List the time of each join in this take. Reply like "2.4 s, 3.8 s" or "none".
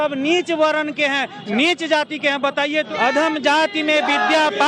2.9 s